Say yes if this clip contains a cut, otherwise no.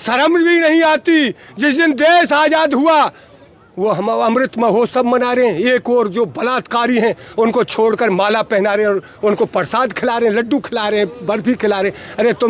no